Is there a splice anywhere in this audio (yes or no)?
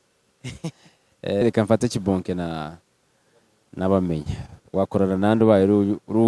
yes